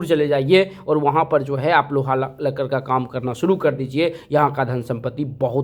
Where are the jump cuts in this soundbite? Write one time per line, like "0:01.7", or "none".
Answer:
none

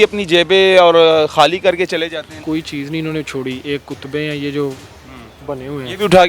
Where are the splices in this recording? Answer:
0:02.3

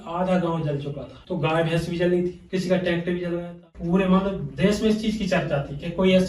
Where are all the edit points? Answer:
0:01.1
0:03.7

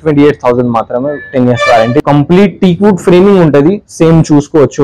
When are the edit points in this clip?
0:02.0

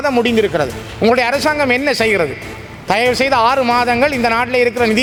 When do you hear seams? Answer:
none

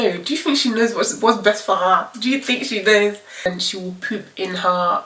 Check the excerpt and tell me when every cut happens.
0:03.5

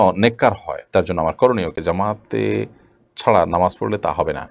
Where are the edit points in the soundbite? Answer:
0:01.8

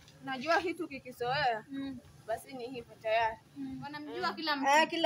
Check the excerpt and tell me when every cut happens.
0:04.1

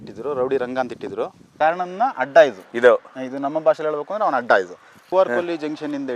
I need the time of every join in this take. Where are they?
0:01.4
0:02.6
0:05.0

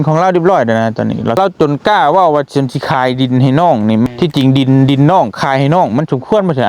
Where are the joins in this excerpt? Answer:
0:01.4
0:04.1

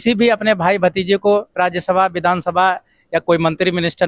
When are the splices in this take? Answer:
none

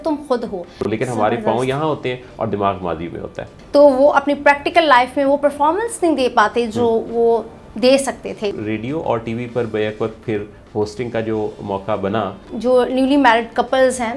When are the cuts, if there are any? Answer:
0:00.9
0:03.5
0:08.6
0:12.5

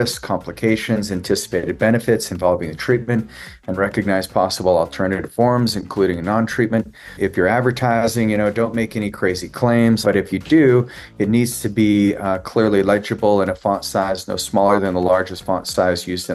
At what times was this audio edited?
0:07.1
0:10.0

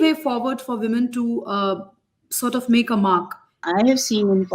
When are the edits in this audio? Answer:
0:03.6

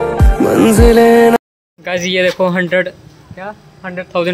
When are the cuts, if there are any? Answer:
0:01.5

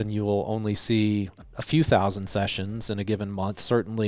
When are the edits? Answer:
0:01.4

